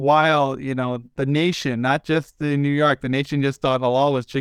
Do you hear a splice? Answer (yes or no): no